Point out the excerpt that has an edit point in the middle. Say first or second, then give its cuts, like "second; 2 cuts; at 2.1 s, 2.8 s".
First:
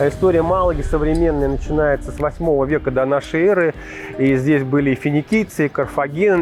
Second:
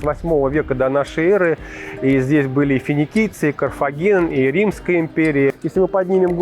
second; 1 cut; at 5.5 s